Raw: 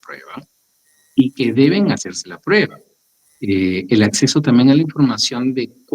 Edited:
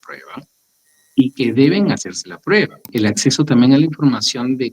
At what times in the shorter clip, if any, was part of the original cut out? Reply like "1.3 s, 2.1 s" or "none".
2.9 s